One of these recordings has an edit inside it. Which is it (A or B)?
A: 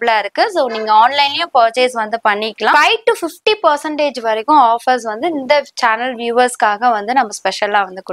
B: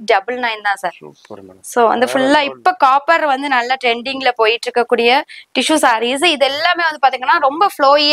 A